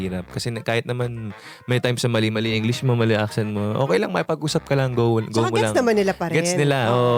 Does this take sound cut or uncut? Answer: uncut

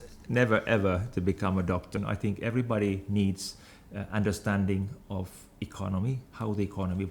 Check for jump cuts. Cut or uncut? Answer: cut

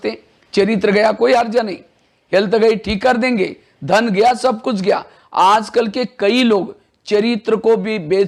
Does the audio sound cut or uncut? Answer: uncut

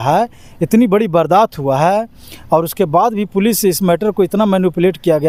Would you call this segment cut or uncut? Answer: uncut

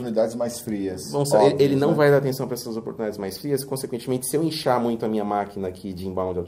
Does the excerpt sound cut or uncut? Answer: uncut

